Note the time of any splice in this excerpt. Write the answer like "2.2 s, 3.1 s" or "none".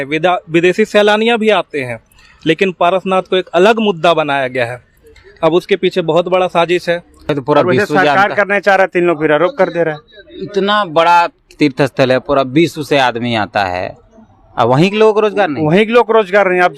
7.1 s